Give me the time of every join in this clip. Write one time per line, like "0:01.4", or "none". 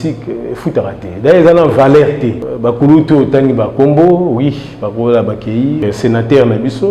0:02.5
0:05.8